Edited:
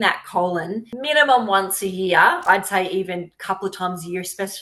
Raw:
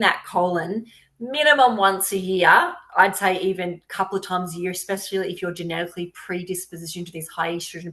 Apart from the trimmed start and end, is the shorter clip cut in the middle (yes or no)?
yes